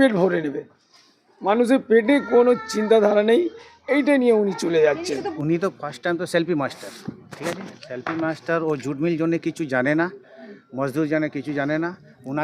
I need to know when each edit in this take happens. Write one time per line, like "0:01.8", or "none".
0:05.2